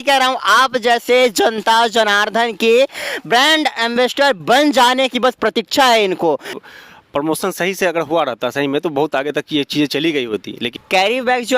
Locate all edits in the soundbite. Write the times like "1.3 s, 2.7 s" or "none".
6.6 s, 10.6 s